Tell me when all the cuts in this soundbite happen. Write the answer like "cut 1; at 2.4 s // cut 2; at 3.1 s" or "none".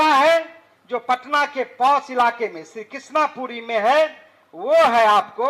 none

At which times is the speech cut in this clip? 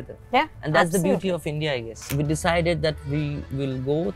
cut 1; at 2.0 s

